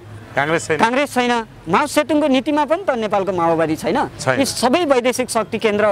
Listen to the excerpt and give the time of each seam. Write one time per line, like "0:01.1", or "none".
none